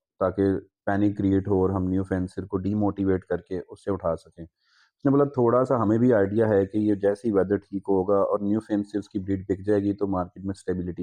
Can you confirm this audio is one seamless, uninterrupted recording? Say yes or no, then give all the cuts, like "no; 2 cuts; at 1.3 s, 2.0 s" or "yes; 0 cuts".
yes; 0 cuts